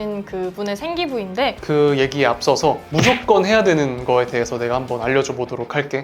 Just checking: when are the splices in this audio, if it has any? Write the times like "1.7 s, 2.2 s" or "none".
1.6 s